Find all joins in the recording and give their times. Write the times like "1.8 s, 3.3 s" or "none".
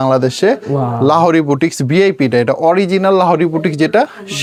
none